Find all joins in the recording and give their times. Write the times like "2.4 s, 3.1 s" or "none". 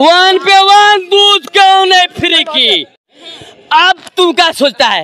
3.1 s